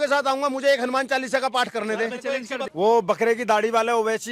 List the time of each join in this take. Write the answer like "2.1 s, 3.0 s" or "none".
2.6 s